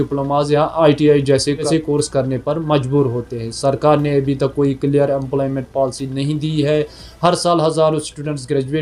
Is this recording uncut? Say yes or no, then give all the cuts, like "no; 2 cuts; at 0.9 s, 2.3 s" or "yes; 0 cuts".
yes; 0 cuts